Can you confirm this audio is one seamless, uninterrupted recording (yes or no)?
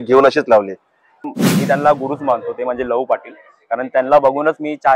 no